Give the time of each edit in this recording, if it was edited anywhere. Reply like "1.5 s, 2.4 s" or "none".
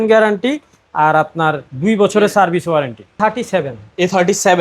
3.2 s